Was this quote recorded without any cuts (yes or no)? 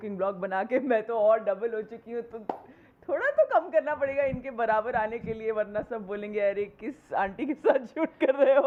yes